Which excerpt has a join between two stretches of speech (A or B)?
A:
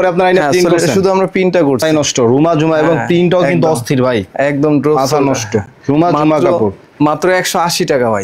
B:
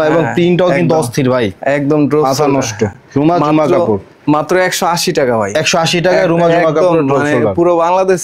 A